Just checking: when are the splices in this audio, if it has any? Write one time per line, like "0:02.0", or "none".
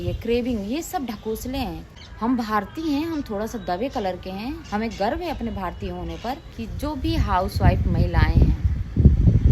0:01.9
0:06.7